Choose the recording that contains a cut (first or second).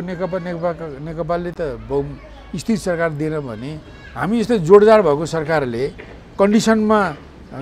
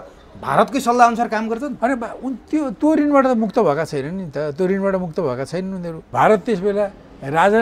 second